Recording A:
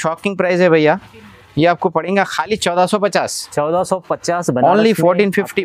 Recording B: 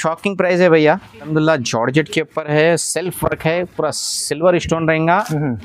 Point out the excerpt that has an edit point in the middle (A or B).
B